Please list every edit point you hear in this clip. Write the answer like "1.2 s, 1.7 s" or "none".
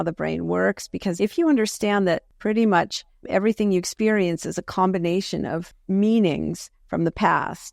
1.1 s, 2.3 s, 5.7 s